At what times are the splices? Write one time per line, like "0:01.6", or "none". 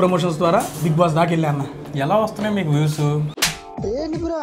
0:03.3

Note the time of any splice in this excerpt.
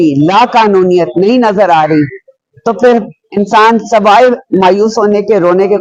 none

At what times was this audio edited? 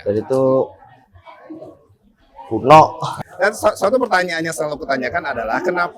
0:03.1

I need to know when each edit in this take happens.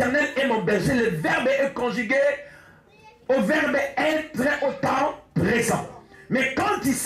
none

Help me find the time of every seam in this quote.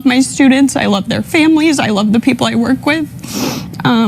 0:02.3

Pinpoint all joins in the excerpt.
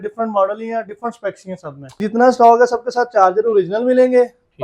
0:02.0

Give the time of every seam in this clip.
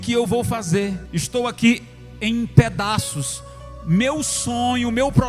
0:01.1

